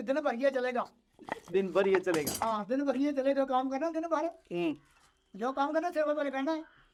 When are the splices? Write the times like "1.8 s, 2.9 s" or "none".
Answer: none